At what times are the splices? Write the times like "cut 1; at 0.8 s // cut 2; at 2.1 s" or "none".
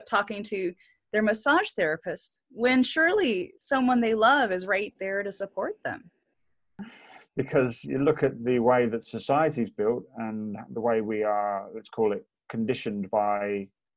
cut 1; at 6.6 s